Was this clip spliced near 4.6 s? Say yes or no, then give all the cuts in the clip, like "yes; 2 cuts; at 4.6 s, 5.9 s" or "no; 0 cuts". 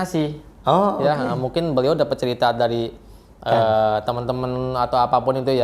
no; 0 cuts